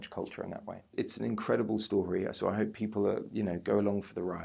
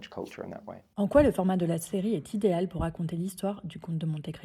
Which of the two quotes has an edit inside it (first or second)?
first